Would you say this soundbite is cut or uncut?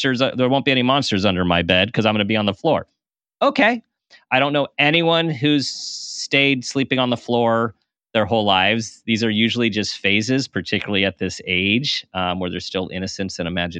uncut